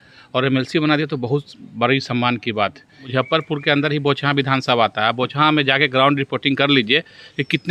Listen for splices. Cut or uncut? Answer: cut